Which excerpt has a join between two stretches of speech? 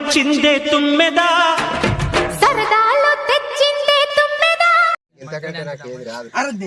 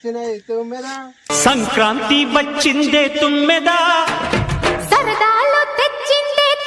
first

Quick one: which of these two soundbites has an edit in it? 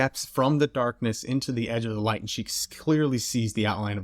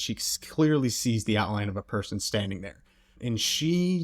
second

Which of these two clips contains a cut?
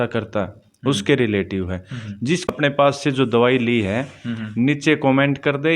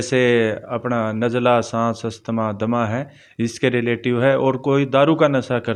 first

